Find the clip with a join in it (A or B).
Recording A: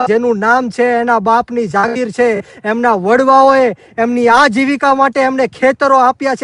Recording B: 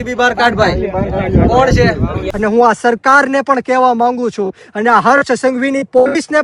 B